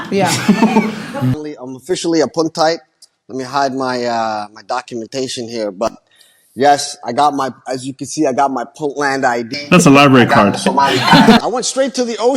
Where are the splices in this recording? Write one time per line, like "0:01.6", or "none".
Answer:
0:01.4
0:11.4